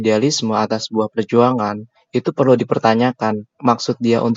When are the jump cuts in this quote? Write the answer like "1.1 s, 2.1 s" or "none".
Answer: none